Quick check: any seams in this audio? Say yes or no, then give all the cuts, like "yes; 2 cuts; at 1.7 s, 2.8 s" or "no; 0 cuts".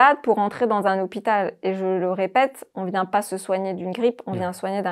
no; 0 cuts